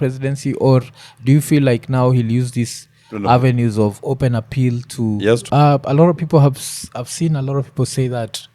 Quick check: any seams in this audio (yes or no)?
yes